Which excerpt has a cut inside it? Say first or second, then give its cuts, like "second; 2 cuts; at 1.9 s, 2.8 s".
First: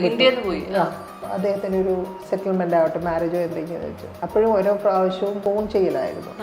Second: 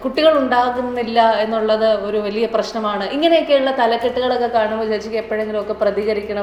first; 3 cuts; at 1.2 s, 4.1 s, 5.4 s